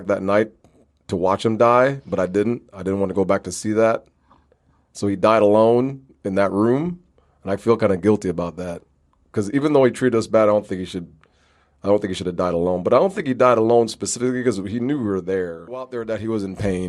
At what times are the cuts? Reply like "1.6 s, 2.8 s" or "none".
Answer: 16.0 s